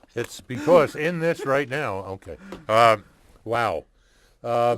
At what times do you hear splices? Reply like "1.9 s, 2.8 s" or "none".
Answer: 3.6 s